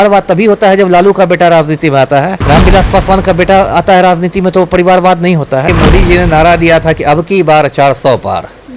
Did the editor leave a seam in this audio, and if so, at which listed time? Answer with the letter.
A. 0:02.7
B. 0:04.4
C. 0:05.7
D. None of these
C